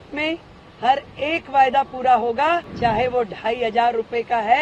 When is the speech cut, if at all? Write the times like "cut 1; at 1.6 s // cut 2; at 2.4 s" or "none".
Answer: cut 1; at 2.7 s